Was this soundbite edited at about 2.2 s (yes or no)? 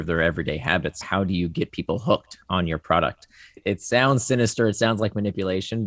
no